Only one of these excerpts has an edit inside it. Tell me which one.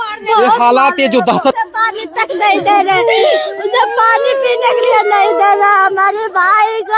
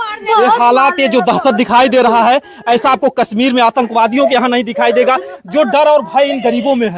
first; 1 cut; at 1.5 s

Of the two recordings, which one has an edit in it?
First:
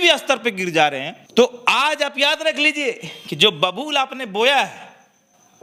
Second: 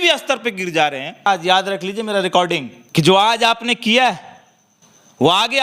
second; 1 cut; at 1.3 s

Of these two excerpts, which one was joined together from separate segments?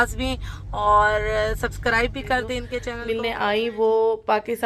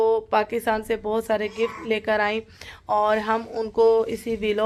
first; 1 cut; at 2.9 s

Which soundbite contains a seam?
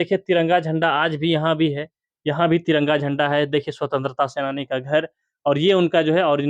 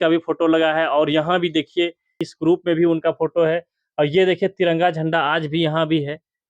second; 1 cut; at 2.2 s

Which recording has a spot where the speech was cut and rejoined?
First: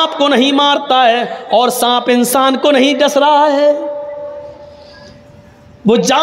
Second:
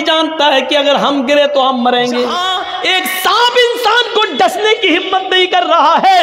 second; 1 cut; at 2.4 s

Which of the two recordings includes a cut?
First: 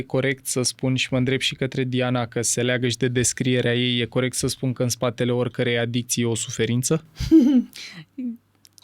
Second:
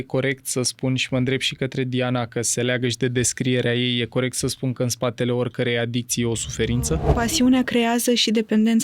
second; 1 cut; at 7.1 s

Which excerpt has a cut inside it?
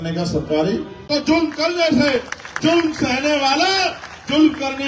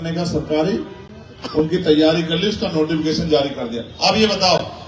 first; 1 cut; at 0.9 s

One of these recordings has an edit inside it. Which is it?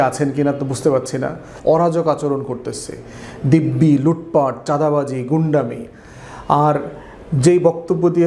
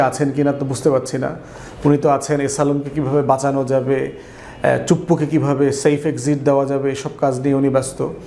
first; 1 cut; at 1.5 s

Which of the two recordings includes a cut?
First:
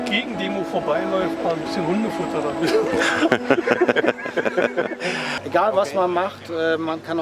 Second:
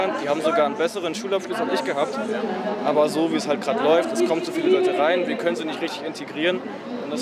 first; 1 cut; at 5.3 s

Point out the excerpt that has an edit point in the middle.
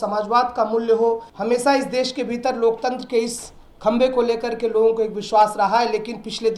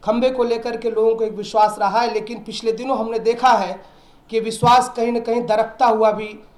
first; 1 cut; at 1.3 s

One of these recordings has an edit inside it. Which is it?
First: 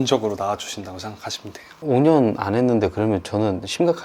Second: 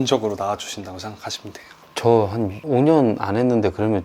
first; 1 cut; at 1.8 s

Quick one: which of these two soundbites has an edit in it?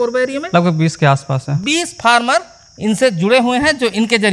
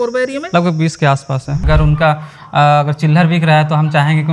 second; 1 cut; at 1.6 s

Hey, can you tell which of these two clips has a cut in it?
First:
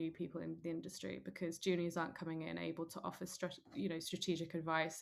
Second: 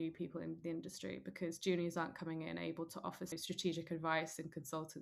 second; 1 cut; at 3.4 s

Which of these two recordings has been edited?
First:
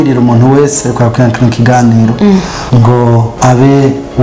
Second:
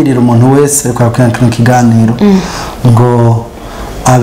first; 1 cut; at 2.8 s

